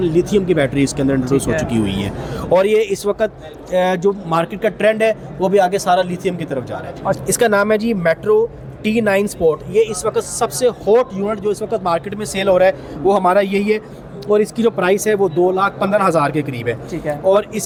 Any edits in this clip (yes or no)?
no